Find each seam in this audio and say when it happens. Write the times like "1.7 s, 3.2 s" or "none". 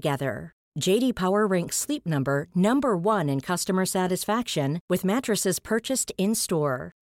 none